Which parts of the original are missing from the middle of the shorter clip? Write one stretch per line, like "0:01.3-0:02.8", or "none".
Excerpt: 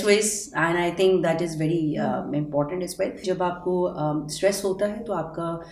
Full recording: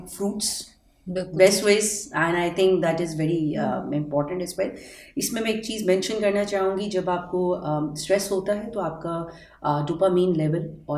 0:04.8-0:06.9